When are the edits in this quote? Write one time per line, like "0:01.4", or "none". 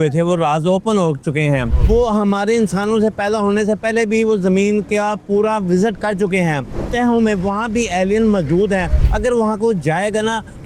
0:01.7
0:06.7
0:09.0